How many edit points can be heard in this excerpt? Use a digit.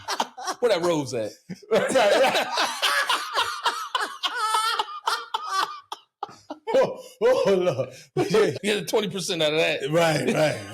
1